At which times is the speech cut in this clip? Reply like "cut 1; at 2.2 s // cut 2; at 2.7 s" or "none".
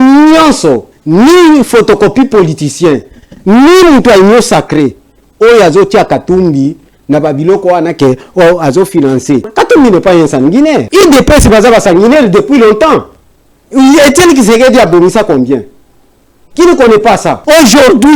cut 1; at 0.9 s // cut 2; at 9.5 s // cut 3; at 10.9 s // cut 4; at 17.4 s